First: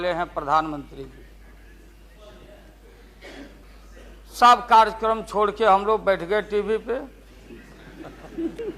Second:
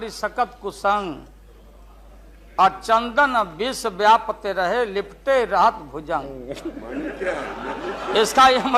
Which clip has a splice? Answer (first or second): first